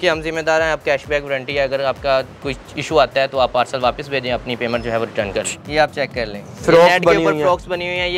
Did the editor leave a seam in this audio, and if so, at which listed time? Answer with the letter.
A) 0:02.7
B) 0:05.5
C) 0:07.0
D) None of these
B